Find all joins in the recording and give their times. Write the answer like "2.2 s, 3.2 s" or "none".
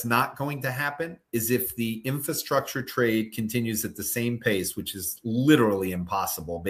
none

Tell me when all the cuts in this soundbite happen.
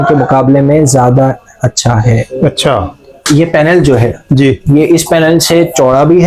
3.2 s

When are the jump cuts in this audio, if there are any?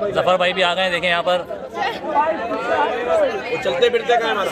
none

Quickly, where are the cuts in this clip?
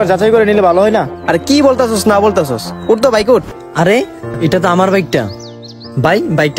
3.5 s

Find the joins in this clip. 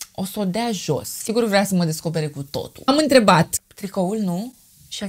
2.9 s, 3.6 s

